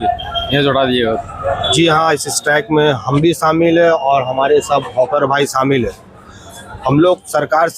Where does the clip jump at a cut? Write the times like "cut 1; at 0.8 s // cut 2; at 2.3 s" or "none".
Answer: cut 1; at 1.7 s